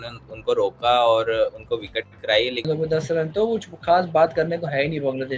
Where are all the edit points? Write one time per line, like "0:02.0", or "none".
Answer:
0:02.7